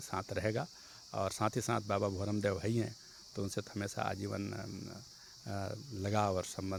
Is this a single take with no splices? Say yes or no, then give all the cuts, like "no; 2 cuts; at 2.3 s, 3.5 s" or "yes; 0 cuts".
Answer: yes; 0 cuts